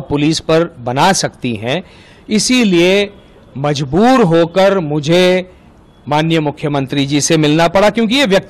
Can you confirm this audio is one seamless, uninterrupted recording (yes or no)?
yes